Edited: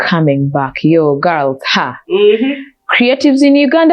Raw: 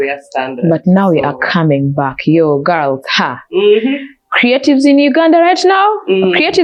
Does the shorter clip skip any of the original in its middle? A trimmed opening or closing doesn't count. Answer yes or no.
no